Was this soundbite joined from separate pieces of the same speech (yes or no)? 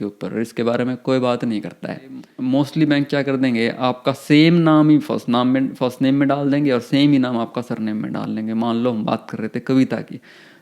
yes